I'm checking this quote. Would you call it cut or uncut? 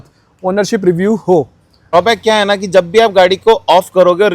cut